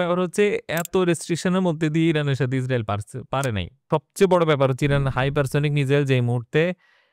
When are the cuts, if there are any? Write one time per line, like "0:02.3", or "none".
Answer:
0:03.9